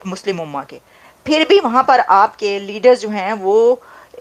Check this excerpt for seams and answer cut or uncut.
uncut